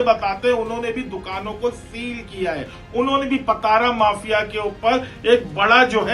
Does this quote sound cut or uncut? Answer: uncut